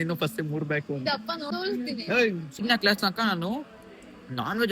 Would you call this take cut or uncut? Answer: cut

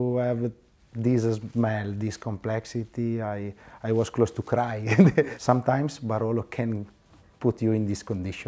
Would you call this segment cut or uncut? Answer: cut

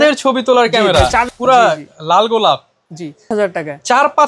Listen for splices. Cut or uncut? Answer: cut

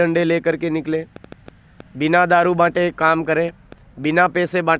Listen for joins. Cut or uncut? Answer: uncut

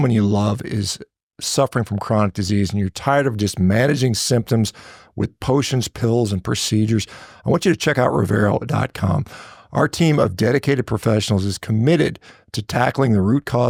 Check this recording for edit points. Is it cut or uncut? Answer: uncut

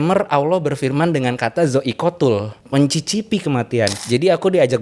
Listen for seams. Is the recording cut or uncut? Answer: cut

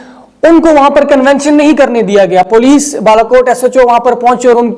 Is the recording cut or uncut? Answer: uncut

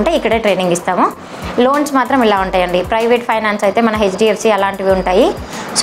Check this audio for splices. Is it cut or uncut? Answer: uncut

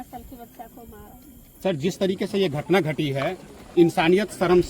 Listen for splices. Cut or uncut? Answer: cut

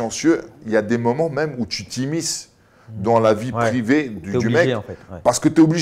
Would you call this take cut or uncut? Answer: uncut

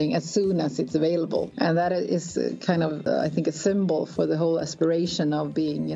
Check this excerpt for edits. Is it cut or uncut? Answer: cut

